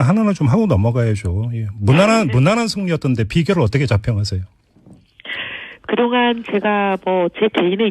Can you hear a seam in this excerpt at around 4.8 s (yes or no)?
no